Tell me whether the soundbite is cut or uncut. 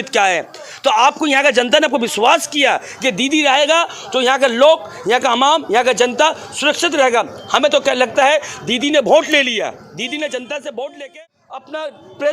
cut